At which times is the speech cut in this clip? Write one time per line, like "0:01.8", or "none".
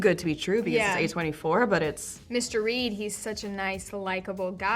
0:02.1